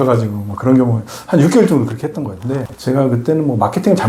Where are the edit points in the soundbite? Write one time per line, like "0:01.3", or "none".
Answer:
0:02.7